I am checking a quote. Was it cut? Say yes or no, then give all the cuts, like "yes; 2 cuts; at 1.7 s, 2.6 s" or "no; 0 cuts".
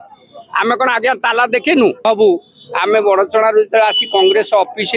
yes; 1 cut; at 2.0 s